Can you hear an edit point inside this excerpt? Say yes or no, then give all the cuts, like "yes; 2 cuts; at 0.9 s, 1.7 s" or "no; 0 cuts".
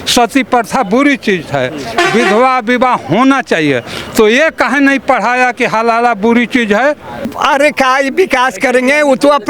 yes; 1 cut; at 7.3 s